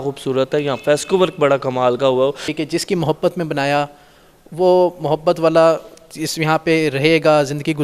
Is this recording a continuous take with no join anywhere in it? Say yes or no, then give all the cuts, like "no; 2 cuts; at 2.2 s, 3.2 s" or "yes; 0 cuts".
no; 1 cut; at 2.5 s